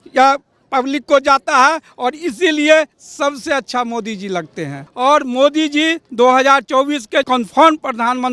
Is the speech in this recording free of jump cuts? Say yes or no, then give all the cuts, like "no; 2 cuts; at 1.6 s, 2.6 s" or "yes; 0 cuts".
no; 2 cuts; at 4.8 s, 7.3 s